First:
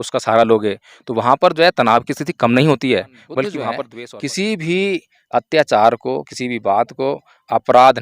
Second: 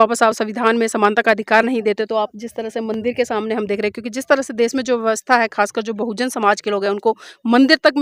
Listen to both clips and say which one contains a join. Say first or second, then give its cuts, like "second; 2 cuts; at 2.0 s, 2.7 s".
first; 1 cut; at 3.6 s